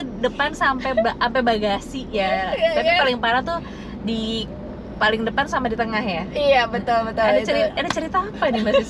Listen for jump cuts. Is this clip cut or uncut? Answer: uncut